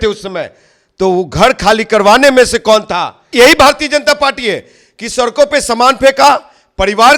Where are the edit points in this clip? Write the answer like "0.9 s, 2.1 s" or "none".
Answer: 3.3 s